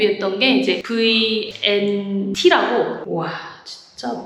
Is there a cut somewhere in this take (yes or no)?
yes